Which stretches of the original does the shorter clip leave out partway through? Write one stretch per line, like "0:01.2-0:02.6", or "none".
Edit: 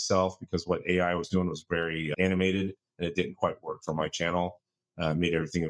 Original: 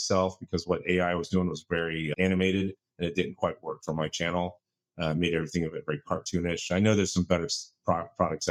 none